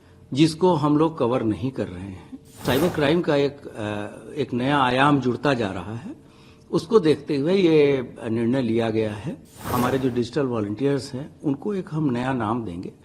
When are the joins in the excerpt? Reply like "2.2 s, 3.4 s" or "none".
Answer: 2.6 s, 9.6 s